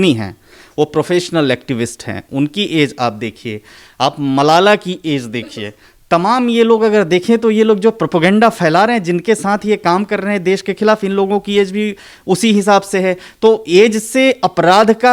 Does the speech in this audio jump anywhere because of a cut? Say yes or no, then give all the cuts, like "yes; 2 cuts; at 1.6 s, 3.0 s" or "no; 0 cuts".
no; 0 cuts